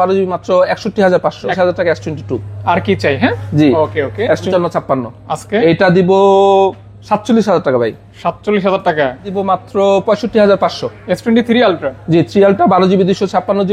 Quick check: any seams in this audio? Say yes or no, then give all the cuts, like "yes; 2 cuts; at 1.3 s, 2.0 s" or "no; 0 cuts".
yes; 3 cuts; at 1.5 s, 4.5 s, 9.3 s